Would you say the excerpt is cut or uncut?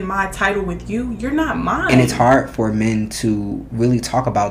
cut